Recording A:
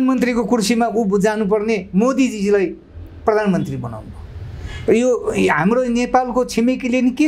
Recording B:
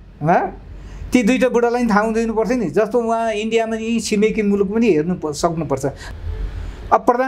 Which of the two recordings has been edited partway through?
B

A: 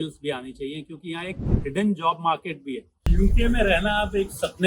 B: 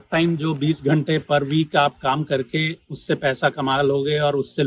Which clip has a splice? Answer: A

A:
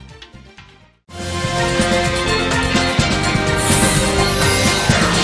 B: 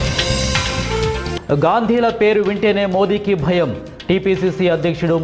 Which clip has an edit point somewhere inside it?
B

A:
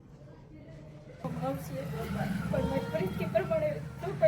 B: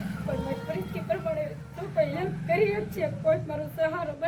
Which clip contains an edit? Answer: A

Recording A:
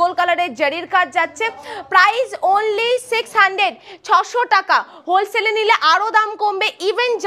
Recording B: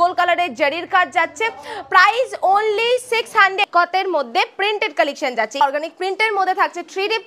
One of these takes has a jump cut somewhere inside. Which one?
B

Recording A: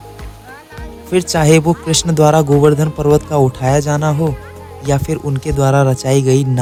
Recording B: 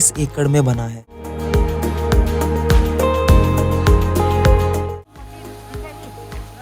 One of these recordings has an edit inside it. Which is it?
B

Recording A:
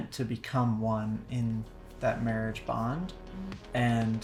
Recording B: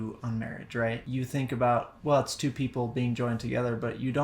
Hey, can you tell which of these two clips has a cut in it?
B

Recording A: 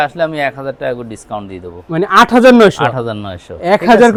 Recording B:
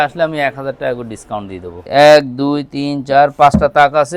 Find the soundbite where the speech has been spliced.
B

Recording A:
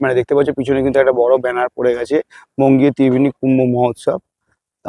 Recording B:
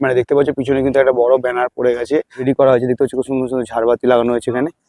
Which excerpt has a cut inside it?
B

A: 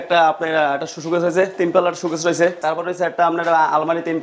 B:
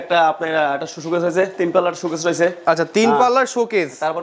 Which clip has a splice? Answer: A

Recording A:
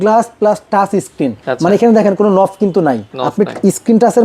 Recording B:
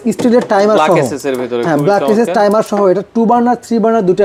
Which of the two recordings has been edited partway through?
A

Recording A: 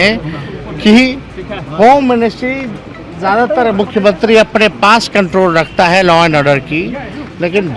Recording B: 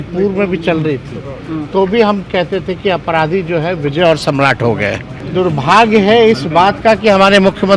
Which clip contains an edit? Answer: B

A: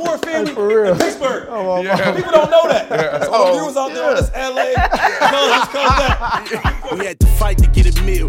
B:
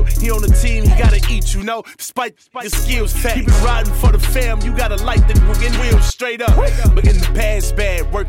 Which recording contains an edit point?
A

